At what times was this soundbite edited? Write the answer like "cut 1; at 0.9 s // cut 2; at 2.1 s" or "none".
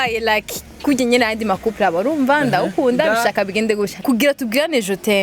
cut 1; at 3.9 s